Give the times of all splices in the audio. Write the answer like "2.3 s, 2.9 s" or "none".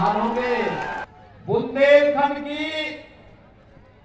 1.1 s